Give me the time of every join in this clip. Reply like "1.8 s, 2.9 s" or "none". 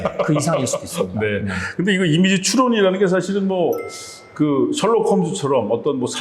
none